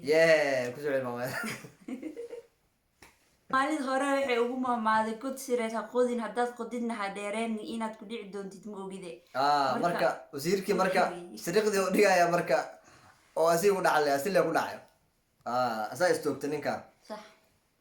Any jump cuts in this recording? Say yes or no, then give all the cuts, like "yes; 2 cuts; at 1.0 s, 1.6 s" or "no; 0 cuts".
yes; 1 cut; at 3.5 s